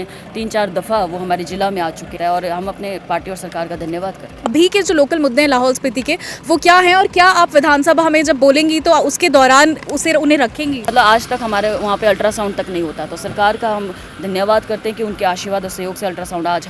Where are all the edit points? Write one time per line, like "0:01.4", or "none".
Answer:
0:02.1
0:04.5
0:10.9